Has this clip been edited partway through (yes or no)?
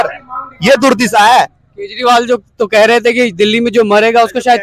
no